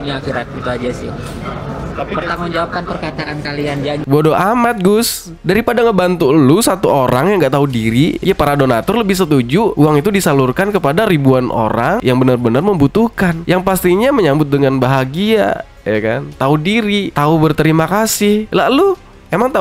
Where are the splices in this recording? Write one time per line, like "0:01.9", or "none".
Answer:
0:04.0